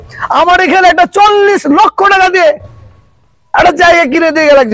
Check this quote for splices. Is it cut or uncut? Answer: uncut